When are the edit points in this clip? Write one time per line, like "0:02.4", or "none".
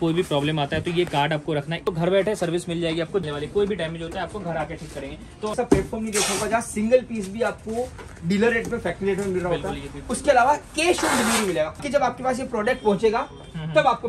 0:01.9
0:03.2
0:05.5
0:11.8

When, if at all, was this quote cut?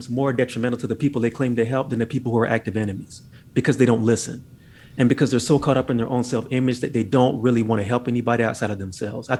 none

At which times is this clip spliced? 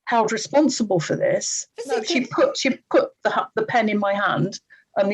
0:02.0

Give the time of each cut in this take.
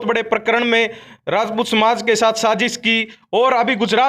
none

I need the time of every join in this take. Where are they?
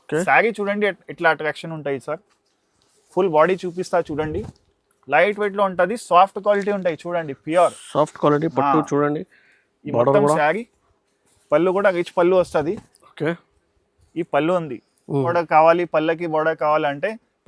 0:15.3

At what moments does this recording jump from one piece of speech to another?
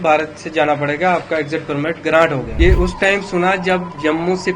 0:02.5

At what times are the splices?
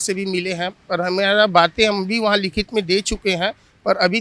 none

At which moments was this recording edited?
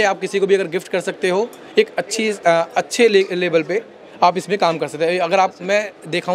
none

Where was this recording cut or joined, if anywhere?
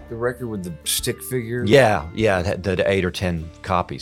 0:01.7

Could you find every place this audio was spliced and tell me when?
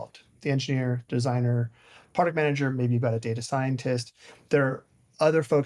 none

